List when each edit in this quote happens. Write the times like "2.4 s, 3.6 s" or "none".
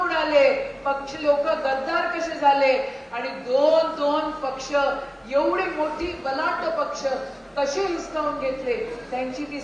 none